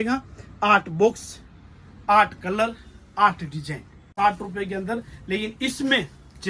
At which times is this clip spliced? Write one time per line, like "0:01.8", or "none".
0:04.1